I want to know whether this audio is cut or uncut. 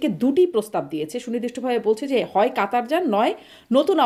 uncut